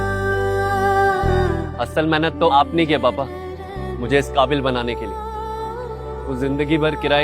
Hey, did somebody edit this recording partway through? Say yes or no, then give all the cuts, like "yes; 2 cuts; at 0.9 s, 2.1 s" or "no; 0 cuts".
yes; 1 cut; at 1.5 s